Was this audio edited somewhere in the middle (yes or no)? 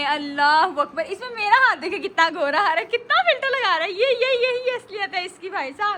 no